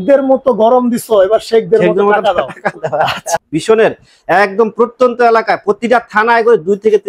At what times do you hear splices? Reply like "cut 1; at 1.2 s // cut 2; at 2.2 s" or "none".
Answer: cut 1; at 3.3 s